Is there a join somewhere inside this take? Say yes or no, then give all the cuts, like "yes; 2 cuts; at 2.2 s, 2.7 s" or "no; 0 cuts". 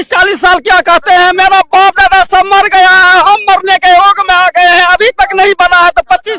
no; 0 cuts